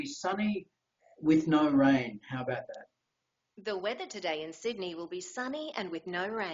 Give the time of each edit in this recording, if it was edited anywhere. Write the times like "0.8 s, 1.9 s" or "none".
none